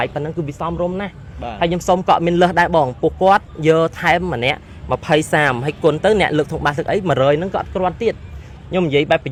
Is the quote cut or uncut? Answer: uncut